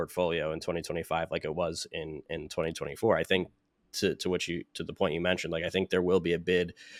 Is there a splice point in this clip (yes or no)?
no